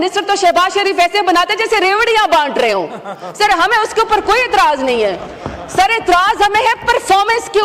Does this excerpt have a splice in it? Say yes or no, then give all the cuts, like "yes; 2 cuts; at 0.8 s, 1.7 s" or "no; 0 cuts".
no; 0 cuts